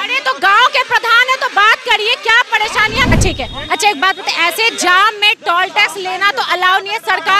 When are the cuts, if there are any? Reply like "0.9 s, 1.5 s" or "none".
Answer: 3.1 s